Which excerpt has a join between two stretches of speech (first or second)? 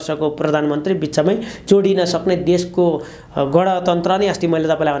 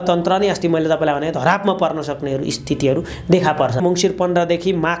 second